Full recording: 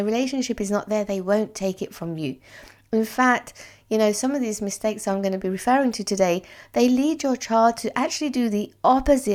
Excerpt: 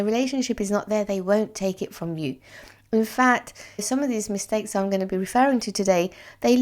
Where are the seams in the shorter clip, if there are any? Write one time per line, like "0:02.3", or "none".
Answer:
0:03.8